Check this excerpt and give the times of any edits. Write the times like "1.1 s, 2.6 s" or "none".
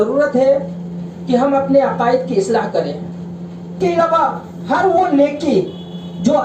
3.8 s